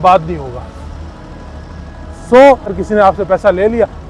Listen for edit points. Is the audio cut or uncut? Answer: cut